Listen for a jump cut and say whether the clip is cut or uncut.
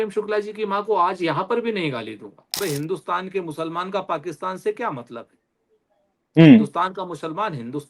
cut